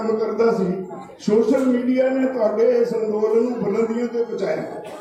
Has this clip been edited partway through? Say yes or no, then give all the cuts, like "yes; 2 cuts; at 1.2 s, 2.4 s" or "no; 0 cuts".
no; 0 cuts